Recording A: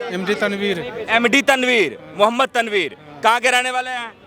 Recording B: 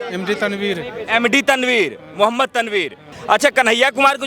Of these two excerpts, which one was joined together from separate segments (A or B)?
B